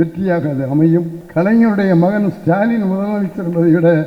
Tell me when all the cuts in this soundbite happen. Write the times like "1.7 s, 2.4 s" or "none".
1.2 s